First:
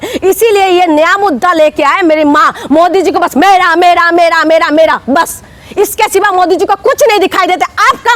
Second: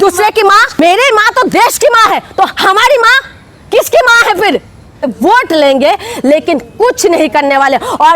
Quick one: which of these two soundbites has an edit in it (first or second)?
second